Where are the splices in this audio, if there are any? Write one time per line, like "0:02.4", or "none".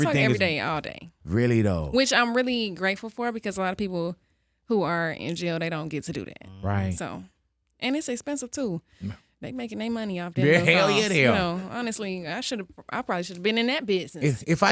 none

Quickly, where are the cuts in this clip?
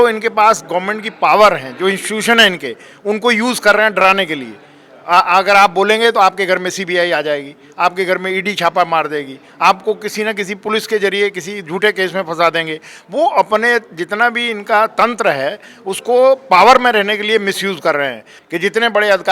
0:18.3

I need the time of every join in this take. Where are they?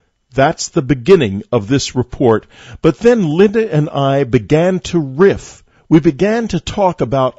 0:05.8

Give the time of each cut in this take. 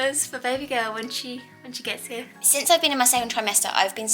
0:02.4

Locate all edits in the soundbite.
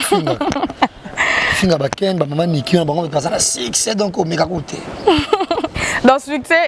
none

